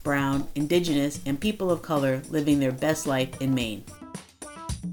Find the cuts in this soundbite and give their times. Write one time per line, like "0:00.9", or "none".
none